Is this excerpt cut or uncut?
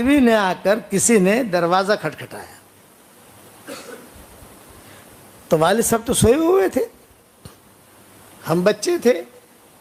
uncut